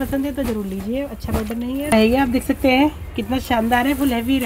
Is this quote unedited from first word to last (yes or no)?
no